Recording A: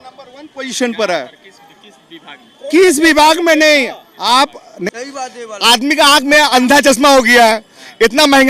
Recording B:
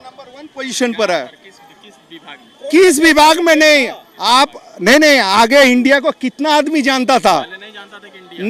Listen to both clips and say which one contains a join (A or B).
A